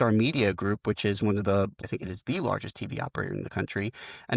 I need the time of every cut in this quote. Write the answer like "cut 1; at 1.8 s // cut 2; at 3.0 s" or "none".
cut 1; at 1.8 s